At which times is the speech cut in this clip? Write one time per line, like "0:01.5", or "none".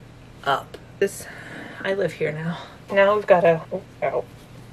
0:02.7
0:03.6